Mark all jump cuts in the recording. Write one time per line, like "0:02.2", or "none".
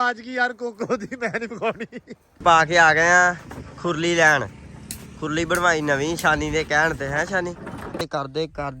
0:02.4
0:08.0